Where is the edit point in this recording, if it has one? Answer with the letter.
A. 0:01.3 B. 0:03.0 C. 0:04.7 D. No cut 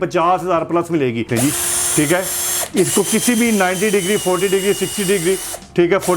A